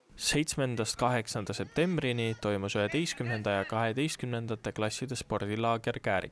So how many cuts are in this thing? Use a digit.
0